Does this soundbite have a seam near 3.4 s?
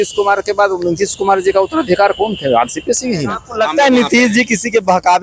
yes; 1 cut; at 3.4 s

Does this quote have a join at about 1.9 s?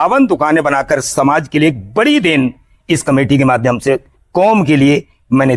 no; 0 cuts

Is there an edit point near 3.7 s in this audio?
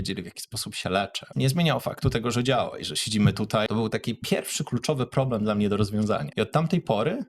yes; 3 cuts; at 1.2 s, 3.7 s, 6.3 s

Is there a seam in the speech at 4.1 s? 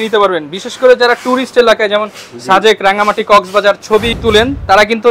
yes; 1 cut; at 4.1 s

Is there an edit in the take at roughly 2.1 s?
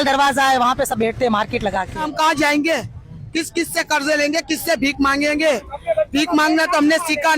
yes; 1 cut; at 2.1 s

